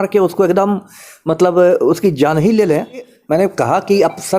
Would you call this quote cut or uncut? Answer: cut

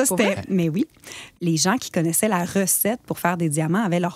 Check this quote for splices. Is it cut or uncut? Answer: cut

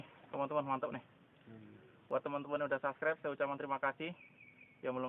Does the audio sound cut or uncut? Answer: uncut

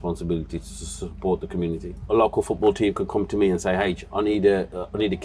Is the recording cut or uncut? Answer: cut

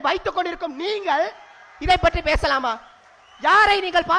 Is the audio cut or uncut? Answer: uncut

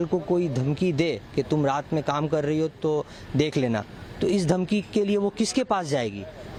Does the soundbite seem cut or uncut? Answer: uncut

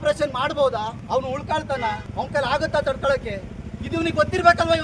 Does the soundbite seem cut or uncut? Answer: cut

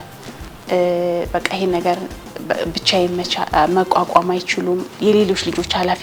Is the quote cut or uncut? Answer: uncut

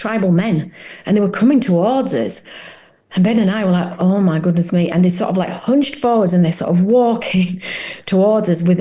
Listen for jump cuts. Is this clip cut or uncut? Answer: uncut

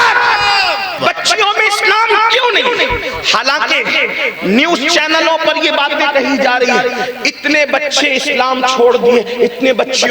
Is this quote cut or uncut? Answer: cut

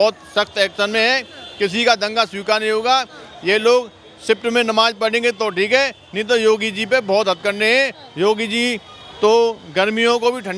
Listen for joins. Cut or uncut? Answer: uncut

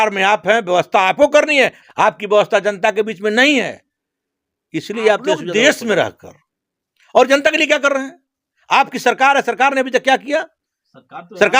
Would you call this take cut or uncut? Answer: cut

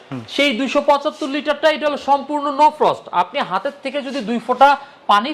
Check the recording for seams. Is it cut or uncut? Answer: uncut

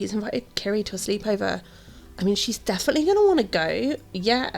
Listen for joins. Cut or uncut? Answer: uncut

